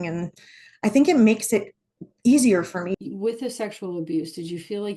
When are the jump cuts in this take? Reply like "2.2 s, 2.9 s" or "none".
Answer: 2.9 s